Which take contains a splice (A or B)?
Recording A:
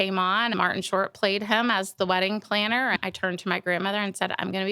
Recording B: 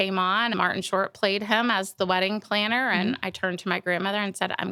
A